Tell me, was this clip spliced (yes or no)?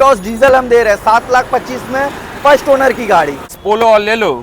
yes